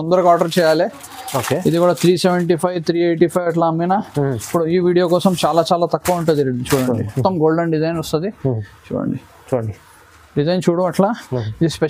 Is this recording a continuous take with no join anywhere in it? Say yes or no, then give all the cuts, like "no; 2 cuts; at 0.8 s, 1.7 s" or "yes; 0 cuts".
no; 1 cut; at 7.1 s